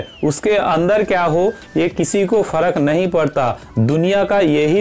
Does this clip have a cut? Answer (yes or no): no